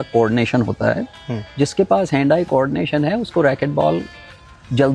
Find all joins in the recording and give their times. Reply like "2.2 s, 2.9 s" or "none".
none